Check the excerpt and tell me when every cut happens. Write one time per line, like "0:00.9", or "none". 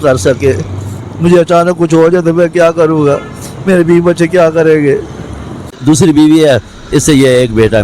0:05.7